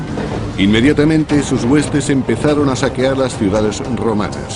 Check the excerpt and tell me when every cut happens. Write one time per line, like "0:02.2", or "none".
none